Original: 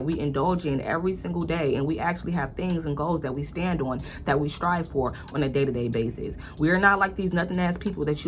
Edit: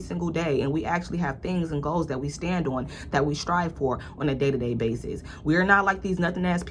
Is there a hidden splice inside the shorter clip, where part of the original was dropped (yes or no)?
no